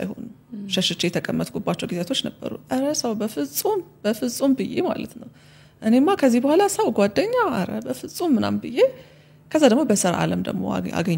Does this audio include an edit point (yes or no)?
no